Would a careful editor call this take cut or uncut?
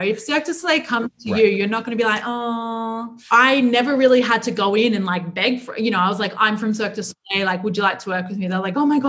cut